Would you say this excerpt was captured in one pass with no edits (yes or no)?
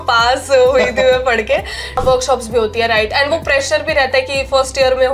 no